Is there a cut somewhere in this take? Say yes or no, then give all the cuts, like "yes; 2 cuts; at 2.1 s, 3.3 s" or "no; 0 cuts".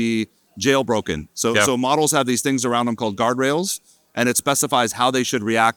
no; 0 cuts